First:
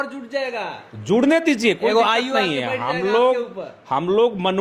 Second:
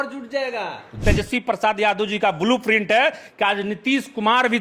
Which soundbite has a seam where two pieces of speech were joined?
second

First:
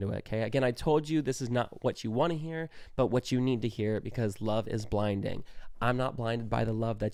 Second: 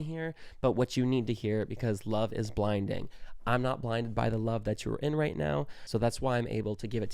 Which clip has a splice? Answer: second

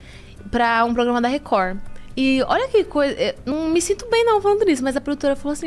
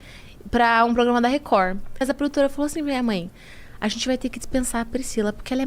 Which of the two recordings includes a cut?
second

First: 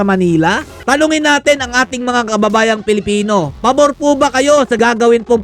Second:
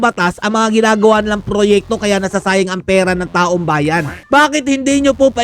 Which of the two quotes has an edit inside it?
second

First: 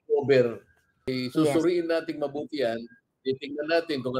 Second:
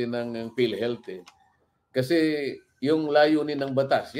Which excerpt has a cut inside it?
first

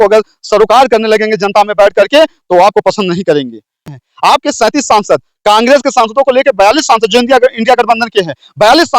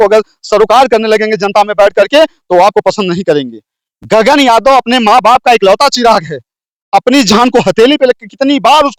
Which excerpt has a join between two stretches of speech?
first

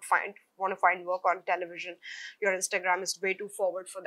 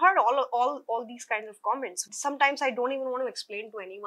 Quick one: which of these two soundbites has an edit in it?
second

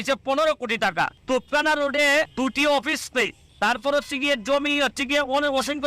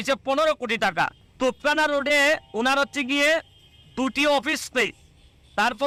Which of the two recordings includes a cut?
first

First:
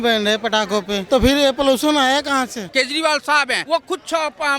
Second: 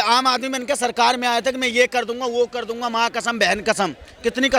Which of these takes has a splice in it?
first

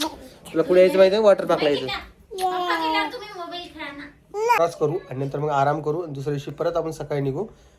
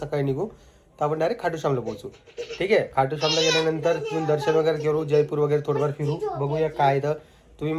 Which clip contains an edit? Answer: first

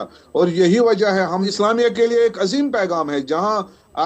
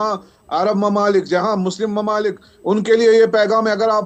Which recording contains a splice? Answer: first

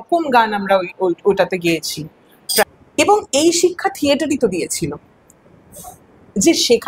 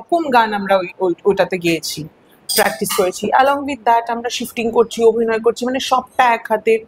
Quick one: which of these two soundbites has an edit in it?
first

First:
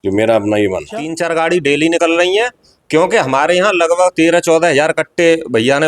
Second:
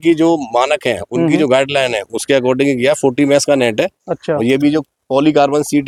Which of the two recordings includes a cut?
first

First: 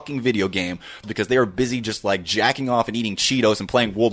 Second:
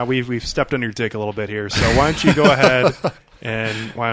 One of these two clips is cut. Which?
first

